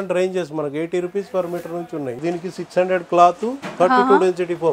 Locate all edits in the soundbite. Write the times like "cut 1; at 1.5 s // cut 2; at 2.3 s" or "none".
cut 1; at 2.2 s